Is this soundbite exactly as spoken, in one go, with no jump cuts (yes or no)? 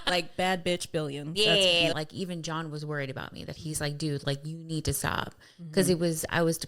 no